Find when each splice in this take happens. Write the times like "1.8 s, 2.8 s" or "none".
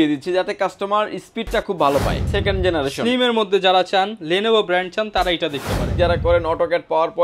2.3 s, 5.9 s